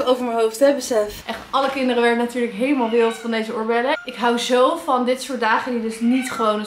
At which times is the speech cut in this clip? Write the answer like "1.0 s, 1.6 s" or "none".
1.2 s, 4.0 s